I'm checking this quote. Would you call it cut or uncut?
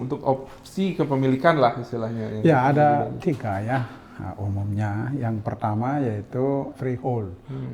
cut